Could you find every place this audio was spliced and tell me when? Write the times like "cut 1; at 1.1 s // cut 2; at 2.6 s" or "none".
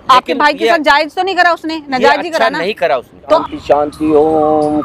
cut 1; at 3.4 s